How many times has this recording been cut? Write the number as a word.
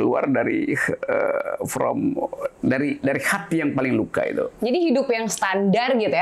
zero